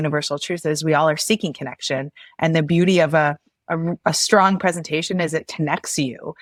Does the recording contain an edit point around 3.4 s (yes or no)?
no